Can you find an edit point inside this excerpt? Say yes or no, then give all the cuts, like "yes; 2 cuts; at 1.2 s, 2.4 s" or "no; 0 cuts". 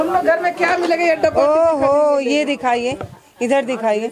no; 0 cuts